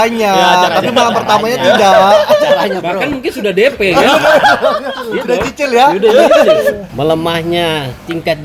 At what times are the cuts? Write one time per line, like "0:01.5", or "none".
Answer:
none